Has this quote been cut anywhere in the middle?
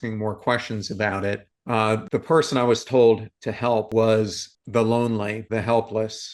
yes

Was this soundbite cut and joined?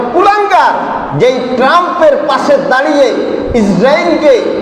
no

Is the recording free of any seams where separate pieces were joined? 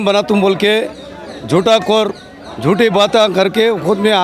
yes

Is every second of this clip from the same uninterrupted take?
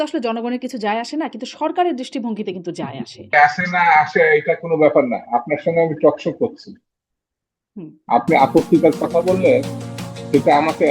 no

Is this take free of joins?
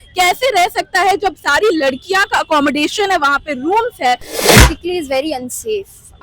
no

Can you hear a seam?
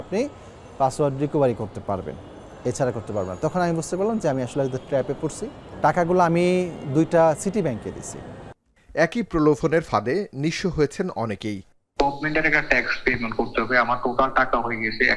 no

